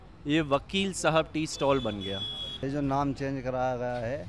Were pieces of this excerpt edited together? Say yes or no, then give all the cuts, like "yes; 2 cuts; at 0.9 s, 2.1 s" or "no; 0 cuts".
yes; 1 cut; at 2.6 s